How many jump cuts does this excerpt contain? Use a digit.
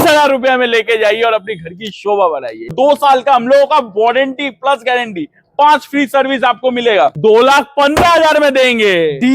2